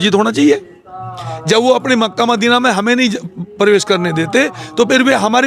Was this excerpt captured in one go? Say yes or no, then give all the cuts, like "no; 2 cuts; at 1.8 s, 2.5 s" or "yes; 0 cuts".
yes; 0 cuts